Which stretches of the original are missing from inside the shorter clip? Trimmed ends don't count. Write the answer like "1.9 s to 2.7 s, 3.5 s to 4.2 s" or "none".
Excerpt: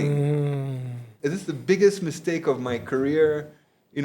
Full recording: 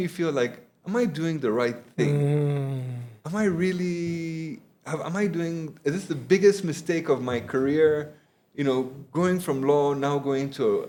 3.1 s to 5.7 s

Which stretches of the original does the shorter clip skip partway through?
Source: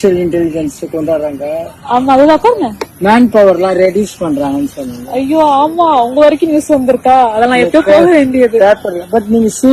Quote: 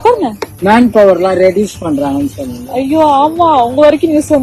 none

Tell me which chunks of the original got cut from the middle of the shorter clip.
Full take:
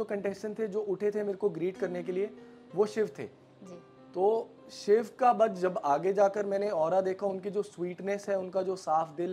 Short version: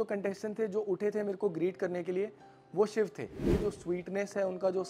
3.5 s to 7.4 s

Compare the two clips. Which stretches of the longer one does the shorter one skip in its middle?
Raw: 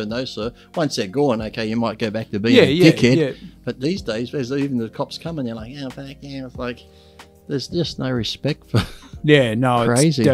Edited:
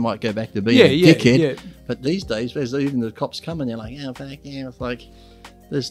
none

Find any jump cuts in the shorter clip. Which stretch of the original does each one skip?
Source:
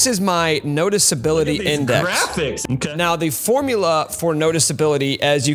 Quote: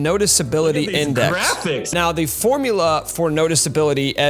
2.6 s to 2.9 s

